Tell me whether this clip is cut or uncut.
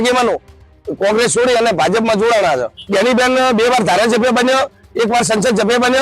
cut